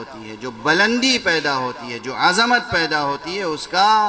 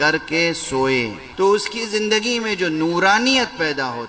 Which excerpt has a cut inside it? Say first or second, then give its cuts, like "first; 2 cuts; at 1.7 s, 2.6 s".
second; 1 cut; at 1.2 s